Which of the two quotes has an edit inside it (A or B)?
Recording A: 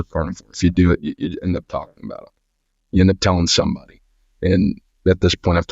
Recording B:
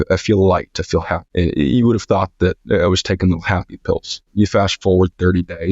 B